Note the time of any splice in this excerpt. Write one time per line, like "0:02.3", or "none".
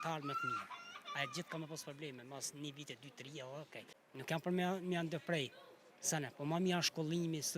0:04.0